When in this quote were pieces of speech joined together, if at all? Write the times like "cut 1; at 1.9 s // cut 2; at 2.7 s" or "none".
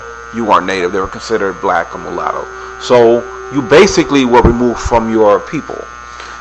cut 1; at 1.9 s